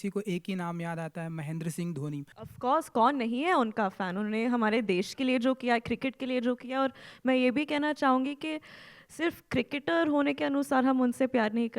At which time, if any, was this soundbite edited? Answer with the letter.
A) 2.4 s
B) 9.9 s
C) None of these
A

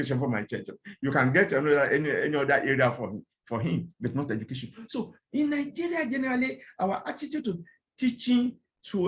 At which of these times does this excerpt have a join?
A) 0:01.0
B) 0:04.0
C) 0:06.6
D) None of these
D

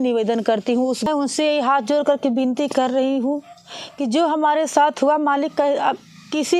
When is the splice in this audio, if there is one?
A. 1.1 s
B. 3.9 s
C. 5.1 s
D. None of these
A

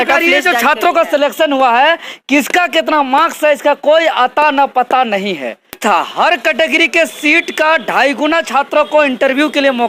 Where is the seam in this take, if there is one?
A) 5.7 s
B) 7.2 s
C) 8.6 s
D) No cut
A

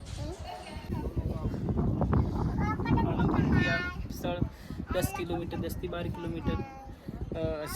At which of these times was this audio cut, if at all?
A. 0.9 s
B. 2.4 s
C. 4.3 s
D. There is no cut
A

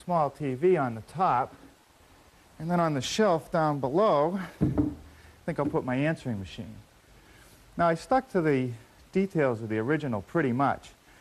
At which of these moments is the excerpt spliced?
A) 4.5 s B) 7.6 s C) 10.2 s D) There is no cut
B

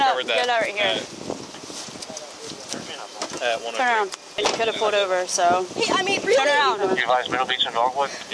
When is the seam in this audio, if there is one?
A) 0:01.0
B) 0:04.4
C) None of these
B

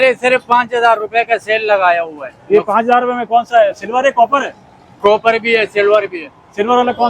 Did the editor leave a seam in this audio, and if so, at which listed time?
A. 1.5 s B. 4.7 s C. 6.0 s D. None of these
D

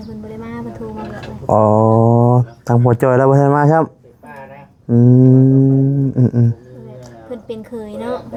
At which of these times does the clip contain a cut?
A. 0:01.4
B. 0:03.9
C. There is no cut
C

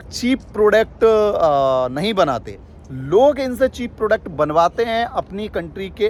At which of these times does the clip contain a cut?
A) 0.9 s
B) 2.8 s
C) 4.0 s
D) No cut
D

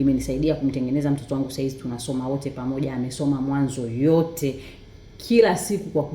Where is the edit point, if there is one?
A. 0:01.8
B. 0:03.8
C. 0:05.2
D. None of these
D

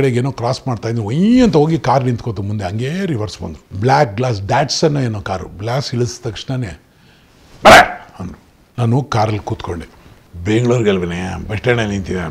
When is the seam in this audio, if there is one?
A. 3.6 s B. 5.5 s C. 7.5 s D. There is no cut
A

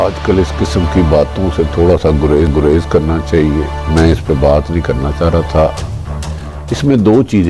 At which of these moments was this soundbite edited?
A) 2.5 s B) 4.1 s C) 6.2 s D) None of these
D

